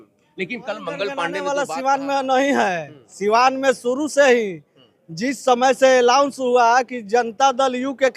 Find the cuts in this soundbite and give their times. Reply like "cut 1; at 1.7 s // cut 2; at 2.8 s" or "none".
cut 1; at 1.4 s